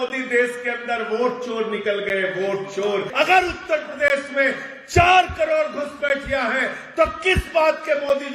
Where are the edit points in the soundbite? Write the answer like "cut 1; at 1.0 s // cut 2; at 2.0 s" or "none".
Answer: cut 1; at 3.1 s